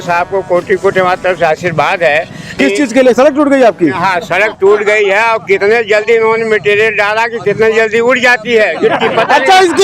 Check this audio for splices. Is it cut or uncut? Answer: uncut